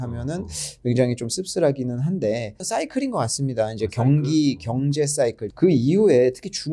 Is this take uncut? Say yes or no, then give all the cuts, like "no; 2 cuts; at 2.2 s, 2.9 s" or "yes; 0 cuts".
no; 2 cuts; at 2.5 s, 5.4 s